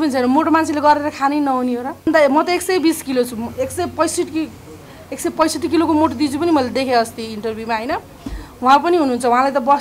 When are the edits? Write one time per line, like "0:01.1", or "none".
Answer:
0:02.1